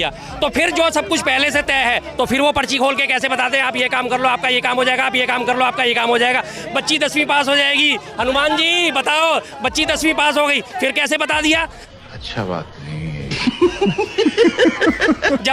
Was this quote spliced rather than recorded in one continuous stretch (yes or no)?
no